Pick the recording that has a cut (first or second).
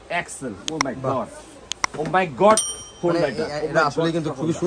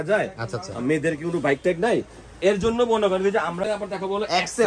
second